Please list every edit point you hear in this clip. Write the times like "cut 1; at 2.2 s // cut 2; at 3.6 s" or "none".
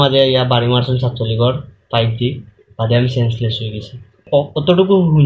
cut 1; at 4.2 s